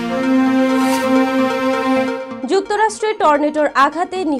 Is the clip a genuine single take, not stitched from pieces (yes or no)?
no